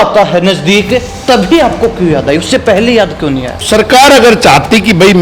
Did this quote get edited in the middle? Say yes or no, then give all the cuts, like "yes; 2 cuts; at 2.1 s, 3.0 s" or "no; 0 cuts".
yes; 1 cut; at 3.7 s